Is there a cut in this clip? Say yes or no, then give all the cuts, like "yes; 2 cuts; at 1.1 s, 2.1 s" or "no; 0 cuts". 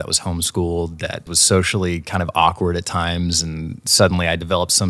yes; 1 cut; at 1.3 s